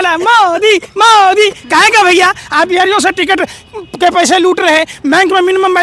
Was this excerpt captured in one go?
yes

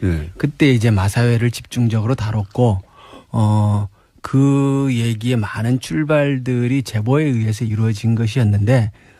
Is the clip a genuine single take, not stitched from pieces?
no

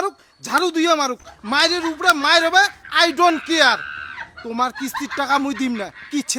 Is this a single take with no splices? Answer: yes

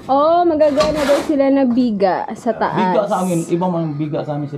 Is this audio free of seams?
yes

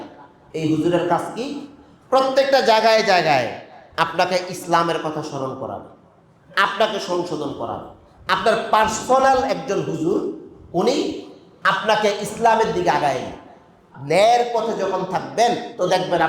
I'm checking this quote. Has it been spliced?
yes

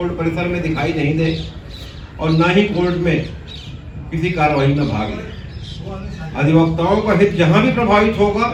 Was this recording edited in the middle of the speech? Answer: no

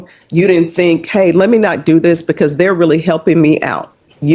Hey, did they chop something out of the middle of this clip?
no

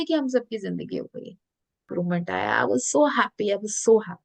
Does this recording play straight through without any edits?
no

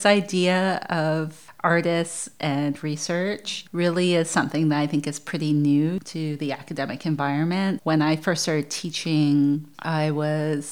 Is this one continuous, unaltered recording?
no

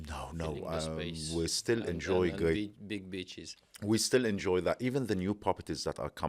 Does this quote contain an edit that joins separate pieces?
no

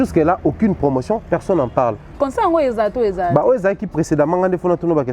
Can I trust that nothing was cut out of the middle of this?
no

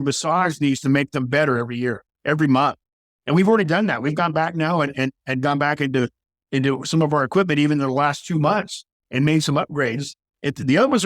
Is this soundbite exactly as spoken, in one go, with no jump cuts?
yes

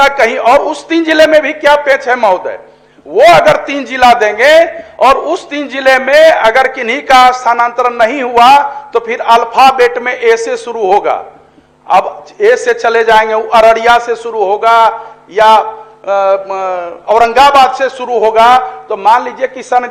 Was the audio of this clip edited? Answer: no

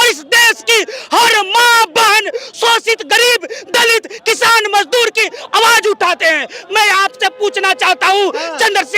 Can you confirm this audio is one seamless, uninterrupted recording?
yes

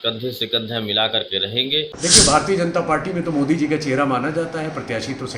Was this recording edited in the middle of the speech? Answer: yes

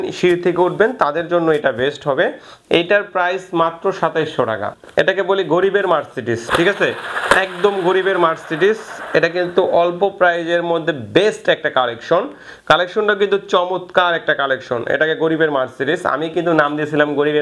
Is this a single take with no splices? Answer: yes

